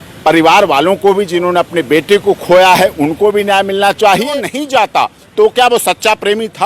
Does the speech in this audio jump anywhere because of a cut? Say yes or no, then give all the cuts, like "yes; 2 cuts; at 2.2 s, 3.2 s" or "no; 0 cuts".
yes; 1 cut; at 4.3 s